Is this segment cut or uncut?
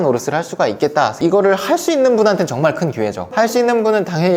cut